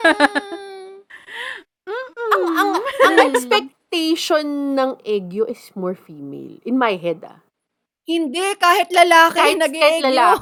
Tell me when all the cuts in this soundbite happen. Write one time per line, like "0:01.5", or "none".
none